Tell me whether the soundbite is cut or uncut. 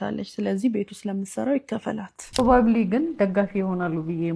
cut